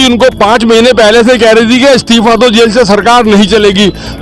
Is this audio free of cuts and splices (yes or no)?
yes